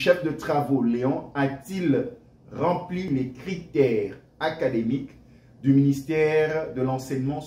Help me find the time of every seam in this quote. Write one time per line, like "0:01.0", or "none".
none